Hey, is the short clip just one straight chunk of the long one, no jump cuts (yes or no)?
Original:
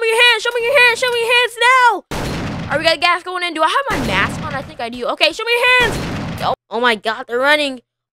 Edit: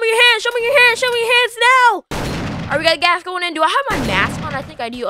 yes